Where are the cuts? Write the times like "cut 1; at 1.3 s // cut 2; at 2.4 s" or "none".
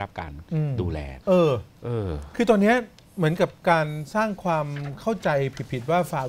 cut 1; at 1.1 s